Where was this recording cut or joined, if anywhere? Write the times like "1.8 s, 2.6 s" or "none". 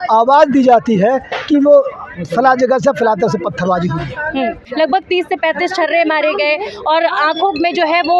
4.6 s